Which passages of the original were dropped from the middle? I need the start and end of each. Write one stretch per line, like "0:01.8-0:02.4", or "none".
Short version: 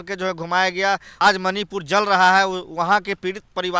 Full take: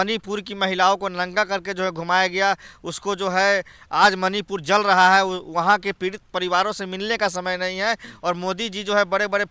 0:02.7-0:03.9